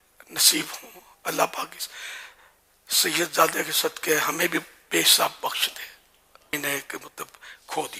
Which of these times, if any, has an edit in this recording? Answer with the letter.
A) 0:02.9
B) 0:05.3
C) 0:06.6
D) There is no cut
C